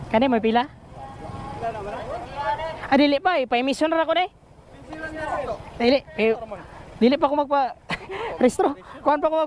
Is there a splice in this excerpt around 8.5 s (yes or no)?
no